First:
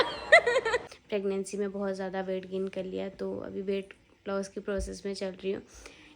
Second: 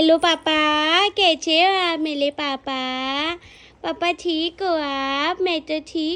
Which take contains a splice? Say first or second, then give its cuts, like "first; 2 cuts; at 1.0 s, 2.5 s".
first; 1 cut; at 1.0 s